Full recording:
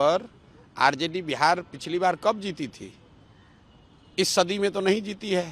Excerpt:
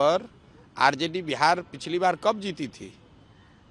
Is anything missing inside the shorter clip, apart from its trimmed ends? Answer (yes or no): no